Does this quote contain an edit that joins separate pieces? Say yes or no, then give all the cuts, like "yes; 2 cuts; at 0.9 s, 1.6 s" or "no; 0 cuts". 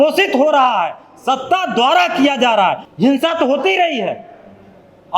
yes; 1 cut; at 2.8 s